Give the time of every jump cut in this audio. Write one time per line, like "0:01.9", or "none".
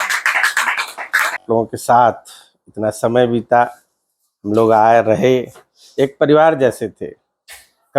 0:01.4